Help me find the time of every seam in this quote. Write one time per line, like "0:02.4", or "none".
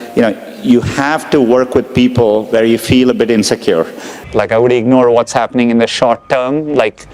0:04.1